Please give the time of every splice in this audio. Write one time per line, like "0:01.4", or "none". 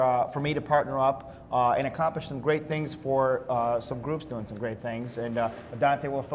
none